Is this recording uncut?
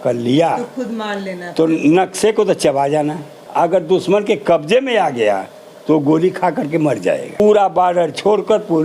no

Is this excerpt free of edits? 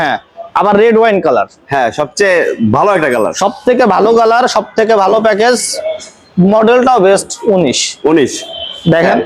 yes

